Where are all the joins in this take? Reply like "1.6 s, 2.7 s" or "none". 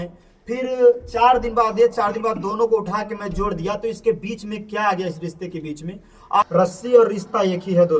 6.5 s